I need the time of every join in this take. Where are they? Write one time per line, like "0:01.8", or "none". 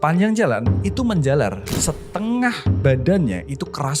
0:01.7